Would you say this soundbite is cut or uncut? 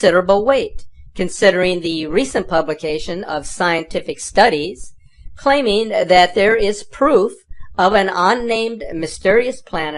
uncut